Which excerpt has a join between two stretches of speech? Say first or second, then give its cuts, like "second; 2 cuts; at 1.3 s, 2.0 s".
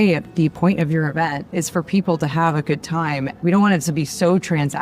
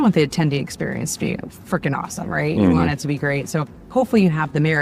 first; 2 cuts; at 1.5 s, 3.3 s